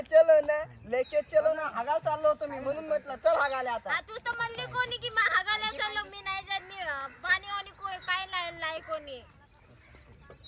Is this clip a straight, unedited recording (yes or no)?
yes